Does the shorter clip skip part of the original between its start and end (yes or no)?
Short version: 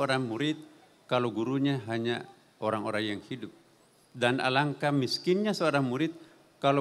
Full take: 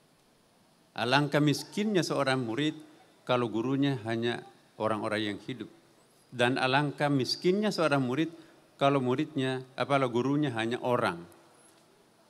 no